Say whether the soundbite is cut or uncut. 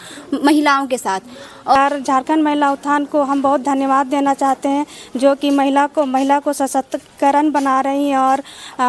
cut